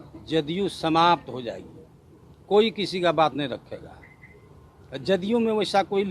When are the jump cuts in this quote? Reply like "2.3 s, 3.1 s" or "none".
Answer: none